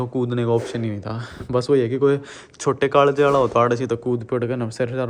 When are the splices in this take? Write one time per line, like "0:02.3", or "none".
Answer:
none